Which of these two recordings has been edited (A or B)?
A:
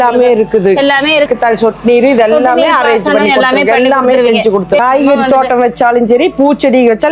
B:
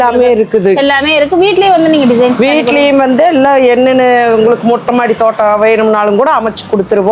A